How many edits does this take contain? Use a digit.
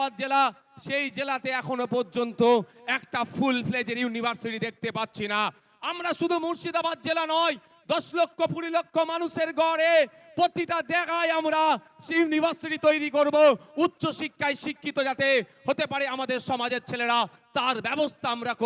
0